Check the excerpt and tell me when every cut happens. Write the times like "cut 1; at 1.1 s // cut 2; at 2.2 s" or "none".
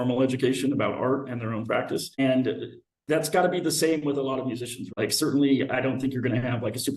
cut 1; at 2.2 s // cut 2; at 4.9 s